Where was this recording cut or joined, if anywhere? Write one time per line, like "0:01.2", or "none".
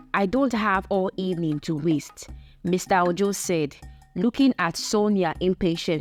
none